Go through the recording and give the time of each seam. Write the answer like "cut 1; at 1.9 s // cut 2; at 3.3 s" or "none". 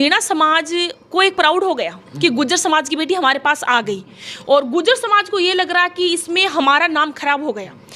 none